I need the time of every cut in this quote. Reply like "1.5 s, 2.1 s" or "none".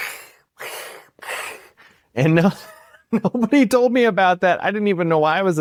none